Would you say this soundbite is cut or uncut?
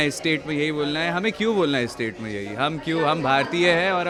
uncut